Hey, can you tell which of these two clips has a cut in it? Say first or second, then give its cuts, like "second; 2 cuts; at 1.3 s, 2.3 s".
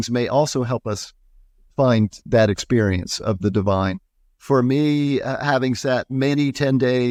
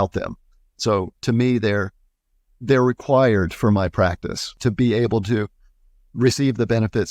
second; 1 cut; at 4.6 s